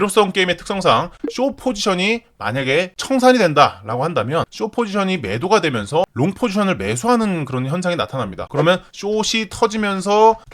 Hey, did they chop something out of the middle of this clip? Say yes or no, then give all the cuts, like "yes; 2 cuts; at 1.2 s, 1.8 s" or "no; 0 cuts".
no; 0 cuts